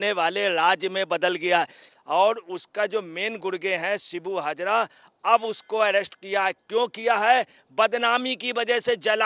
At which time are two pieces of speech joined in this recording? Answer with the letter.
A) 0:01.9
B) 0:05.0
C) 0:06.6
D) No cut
A